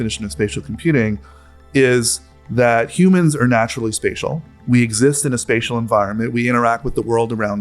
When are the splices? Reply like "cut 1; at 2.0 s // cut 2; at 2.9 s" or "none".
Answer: cut 1; at 1.7 s